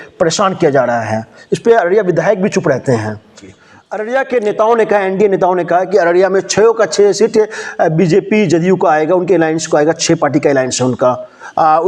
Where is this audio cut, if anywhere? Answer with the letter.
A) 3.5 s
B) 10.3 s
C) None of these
A